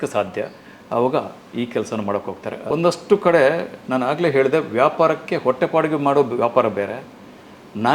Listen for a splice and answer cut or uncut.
cut